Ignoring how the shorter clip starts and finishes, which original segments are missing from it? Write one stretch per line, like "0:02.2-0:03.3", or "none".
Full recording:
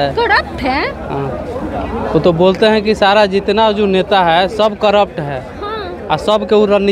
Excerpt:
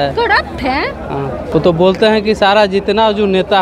0:01.5-0:02.1